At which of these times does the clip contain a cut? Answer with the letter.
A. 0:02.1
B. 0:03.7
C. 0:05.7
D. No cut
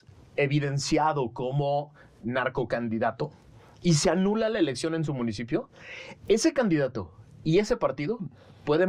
D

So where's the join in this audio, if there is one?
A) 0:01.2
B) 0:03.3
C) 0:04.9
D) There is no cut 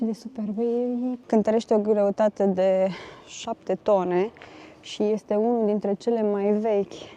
A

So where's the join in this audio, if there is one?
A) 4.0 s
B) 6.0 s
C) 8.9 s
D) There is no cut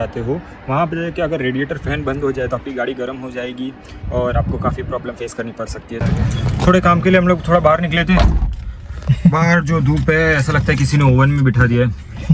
B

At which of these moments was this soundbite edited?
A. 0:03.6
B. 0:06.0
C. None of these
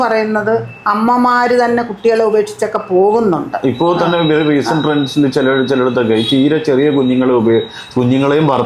C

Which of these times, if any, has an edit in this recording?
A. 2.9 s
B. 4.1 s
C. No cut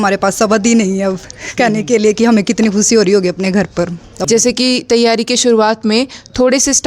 B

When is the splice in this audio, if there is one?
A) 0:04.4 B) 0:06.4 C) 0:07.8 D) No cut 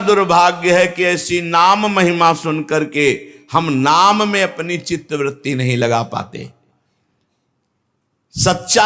D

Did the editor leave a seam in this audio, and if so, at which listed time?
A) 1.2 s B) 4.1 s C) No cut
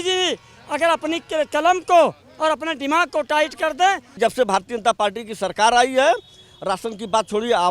B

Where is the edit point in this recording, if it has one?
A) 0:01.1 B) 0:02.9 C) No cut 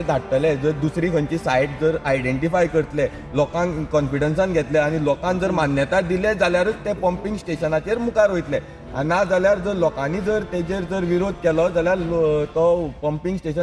C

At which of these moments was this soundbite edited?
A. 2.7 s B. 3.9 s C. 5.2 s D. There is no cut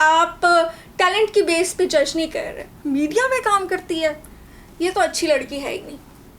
A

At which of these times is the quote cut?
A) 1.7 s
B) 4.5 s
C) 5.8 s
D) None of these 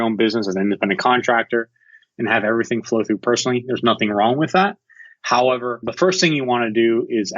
C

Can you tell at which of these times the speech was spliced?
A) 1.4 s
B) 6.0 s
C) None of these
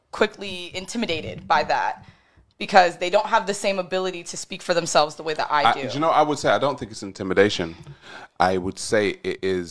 B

